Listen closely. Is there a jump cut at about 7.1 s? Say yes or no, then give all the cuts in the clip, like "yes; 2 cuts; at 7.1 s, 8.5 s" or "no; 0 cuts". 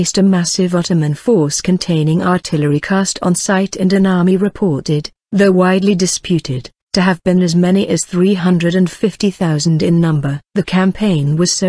yes; 1 cut; at 7.1 s